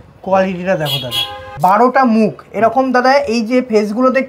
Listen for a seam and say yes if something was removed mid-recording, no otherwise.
yes